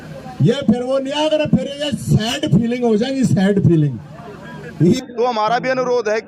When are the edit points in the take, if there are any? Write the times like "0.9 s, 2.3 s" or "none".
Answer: 5.0 s